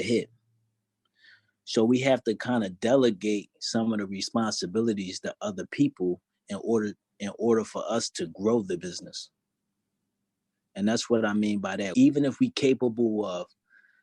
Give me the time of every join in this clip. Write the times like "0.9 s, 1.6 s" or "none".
11.8 s